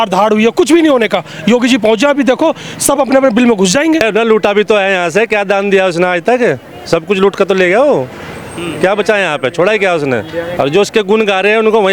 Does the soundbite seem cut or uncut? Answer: cut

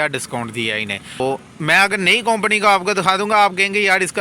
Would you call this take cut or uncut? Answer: cut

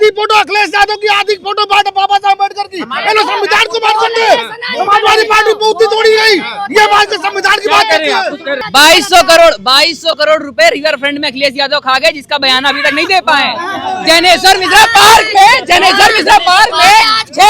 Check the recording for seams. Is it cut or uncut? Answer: cut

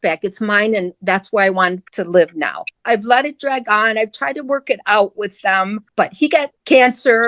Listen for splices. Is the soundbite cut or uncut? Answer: cut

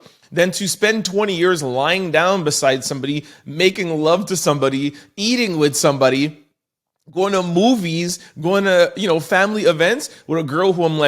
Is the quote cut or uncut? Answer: uncut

